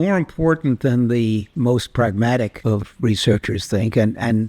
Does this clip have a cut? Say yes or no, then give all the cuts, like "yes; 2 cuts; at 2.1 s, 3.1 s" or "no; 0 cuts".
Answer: yes; 2 cuts; at 1.5 s, 2.6 s